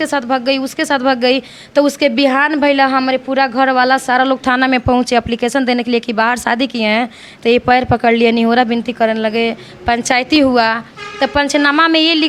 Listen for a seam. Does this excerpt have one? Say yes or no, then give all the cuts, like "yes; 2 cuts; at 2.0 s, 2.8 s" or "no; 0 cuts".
no; 0 cuts